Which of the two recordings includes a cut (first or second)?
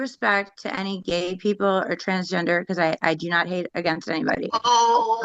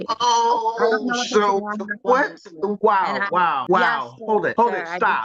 second